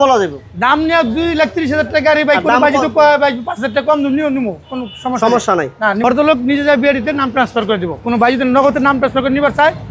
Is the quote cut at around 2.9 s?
no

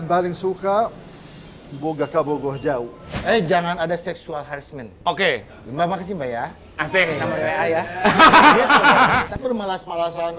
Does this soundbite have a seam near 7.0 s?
no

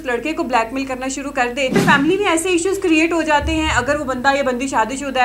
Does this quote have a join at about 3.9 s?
no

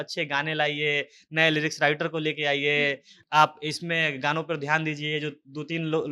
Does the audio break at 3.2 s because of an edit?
no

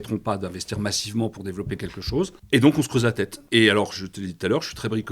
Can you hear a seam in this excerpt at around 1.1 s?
no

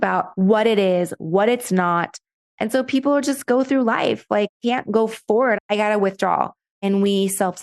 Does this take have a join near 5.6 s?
yes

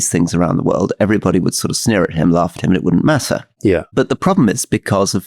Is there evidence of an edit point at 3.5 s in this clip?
no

